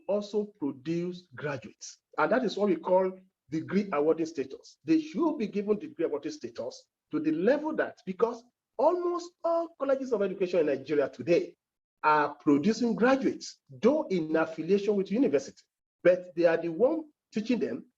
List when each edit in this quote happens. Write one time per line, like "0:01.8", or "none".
none

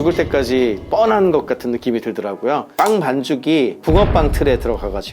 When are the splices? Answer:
0:02.7

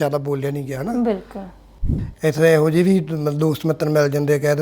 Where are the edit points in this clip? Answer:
0:01.8

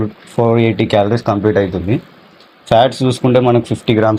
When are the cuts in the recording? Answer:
none

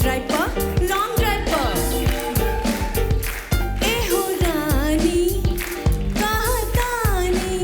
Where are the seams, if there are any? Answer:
none

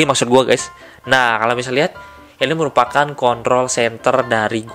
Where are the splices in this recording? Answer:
none

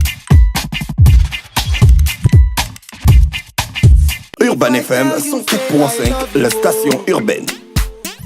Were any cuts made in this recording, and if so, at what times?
0:04.1

